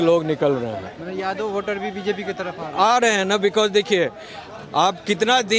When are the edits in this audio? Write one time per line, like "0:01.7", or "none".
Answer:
none